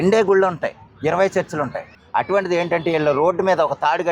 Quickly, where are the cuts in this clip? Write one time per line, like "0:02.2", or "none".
0:01.9